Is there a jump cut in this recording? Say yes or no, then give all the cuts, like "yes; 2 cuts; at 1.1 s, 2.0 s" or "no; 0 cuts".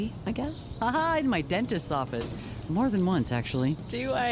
no; 0 cuts